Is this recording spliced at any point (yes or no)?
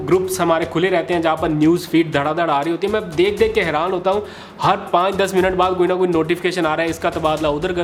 no